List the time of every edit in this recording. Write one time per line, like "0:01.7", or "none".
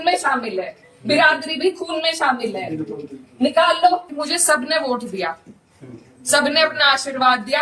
0:04.1